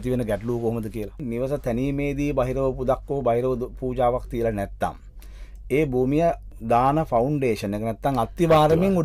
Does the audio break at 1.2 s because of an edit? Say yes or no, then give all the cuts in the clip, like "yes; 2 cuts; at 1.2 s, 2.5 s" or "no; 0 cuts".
yes; 2 cuts; at 1.2 s, 6.5 s